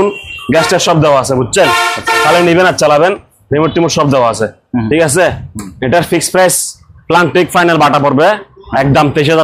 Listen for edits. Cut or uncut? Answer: uncut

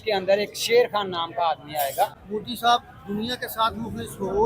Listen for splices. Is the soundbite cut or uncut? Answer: cut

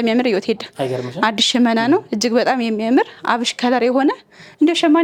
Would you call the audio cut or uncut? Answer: uncut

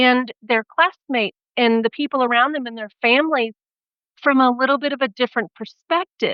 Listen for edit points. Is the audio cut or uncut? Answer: uncut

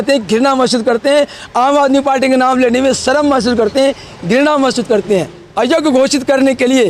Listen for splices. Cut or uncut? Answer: cut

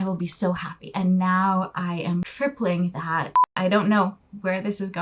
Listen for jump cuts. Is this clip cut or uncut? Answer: cut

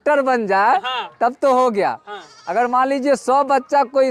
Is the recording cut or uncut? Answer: uncut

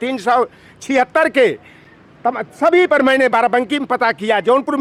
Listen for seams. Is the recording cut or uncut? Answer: uncut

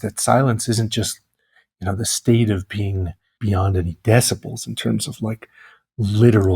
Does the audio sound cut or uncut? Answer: cut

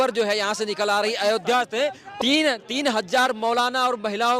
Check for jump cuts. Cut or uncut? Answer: cut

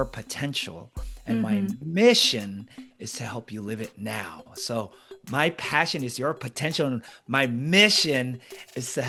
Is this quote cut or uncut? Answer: uncut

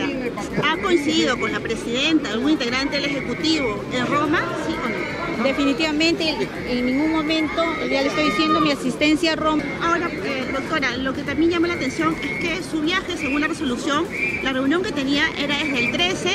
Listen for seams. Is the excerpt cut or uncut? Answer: cut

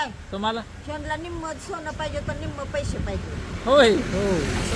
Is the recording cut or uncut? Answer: uncut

